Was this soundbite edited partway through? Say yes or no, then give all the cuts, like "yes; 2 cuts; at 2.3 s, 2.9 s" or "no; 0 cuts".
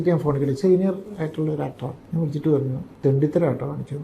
yes; 2 cuts; at 1.9 s, 2.8 s